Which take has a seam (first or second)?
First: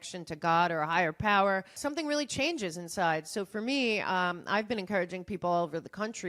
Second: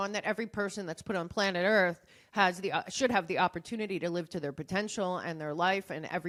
first